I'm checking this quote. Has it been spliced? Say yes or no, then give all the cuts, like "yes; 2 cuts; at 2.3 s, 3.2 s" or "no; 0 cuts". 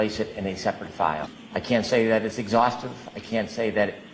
yes; 1 cut; at 1.3 s